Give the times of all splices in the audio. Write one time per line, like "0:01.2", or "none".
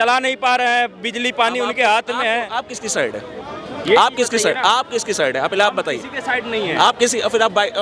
none